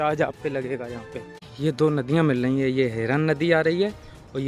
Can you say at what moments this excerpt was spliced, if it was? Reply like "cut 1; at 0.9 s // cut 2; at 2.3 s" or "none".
cut 1; at 1.5 s